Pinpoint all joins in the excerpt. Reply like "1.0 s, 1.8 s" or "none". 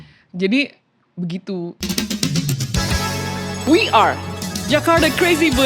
1.8 s